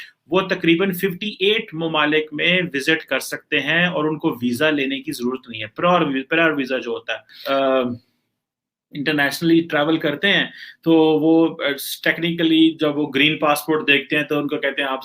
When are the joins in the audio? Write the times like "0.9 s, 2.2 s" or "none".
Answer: 7.4 s